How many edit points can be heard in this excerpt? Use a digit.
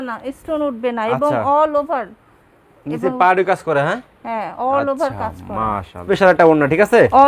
1